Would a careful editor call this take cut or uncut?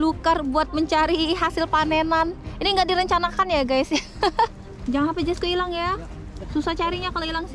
cut